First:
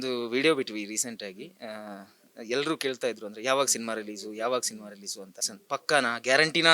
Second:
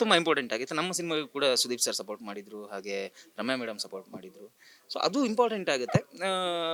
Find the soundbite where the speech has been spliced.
first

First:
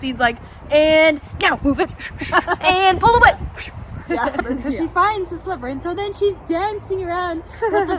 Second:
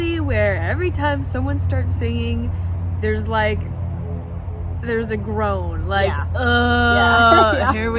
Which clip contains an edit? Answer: first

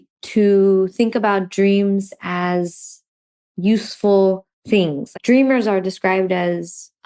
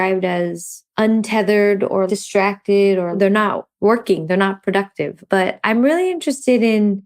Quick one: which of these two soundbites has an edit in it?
second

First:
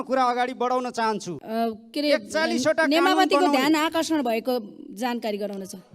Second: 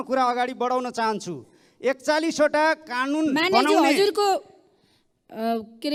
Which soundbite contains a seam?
first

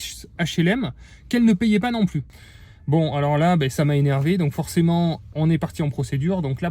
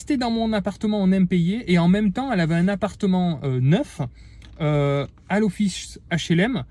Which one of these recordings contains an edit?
first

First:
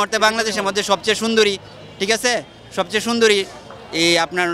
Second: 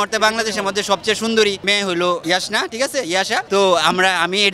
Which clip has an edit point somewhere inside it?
second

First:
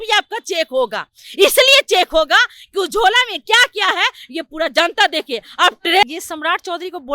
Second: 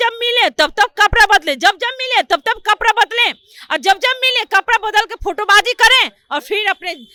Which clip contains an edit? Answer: first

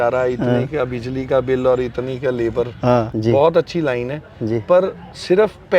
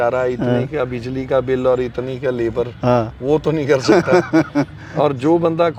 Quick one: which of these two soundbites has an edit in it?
first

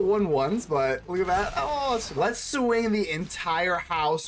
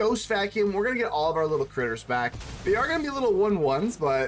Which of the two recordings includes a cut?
first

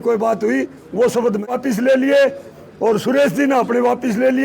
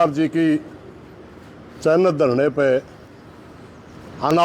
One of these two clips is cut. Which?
first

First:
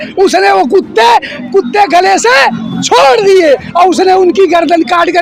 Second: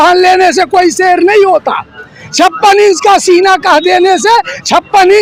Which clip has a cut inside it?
first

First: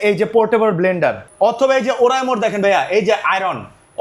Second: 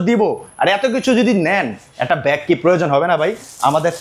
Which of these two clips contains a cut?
first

